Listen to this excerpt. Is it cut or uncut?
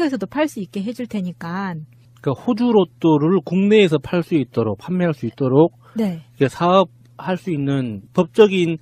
cut